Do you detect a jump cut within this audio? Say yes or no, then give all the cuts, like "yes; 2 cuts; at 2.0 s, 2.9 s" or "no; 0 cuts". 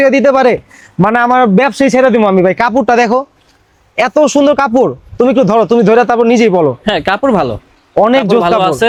no; 0 cuts